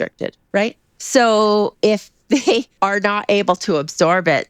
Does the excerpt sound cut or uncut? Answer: cut